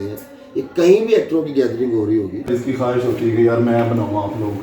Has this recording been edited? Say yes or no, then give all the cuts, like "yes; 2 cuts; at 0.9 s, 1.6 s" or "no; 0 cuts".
yes; 1 cut; at 2.5 s